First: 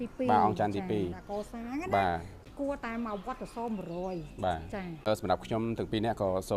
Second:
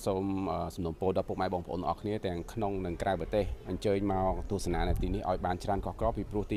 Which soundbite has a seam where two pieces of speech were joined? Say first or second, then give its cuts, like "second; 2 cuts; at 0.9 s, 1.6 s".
first; 2 cuts; at 2.5 s, 5.1 s